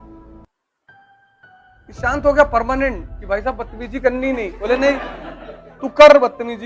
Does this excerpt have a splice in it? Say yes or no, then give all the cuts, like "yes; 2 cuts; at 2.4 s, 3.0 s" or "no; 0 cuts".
no; 0 cuts